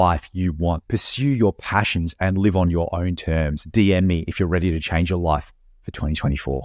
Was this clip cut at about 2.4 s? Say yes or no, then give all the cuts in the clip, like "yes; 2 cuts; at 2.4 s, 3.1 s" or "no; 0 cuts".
no; 2 cuts; at 0.8 s, 3.6 s